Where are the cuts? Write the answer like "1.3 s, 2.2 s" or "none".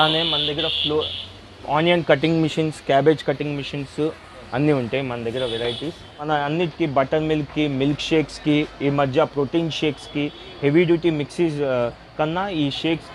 6.3 s

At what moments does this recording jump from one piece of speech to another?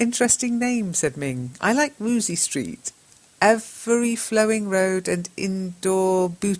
2.7 s

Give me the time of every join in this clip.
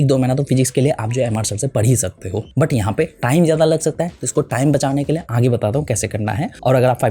none

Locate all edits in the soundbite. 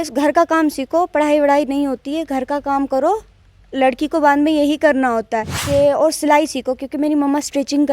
5.6 s

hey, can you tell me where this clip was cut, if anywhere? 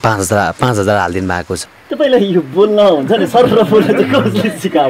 1.6 s

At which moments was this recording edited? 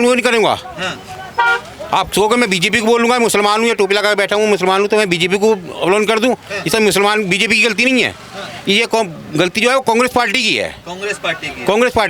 none

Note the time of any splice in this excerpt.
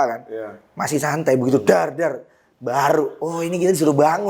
none

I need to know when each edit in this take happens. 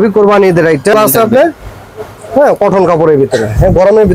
0.9 s

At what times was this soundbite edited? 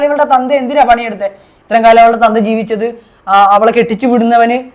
none

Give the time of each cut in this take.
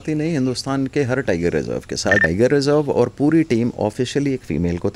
2.2 s

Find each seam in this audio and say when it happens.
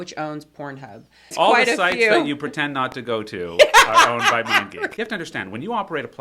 1.3 s, 4.8 s

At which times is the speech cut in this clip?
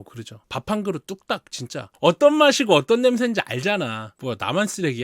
1.8 s

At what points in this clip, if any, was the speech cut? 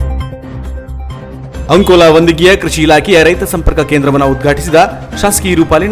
none

